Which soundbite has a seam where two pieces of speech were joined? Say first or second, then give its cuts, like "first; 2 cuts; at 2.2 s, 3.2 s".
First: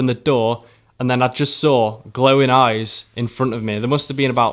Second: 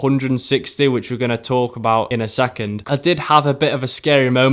second; 1 cut; at 2.7 s